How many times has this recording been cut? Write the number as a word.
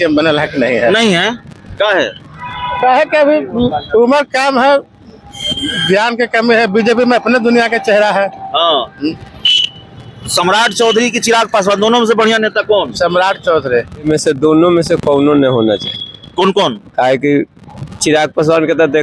one